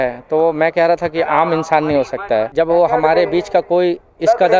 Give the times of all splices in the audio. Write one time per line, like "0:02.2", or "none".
0:02.5